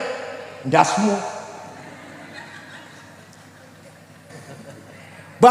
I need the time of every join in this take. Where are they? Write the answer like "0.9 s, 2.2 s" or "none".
4.3 s